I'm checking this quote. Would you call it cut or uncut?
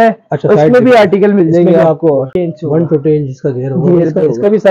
cut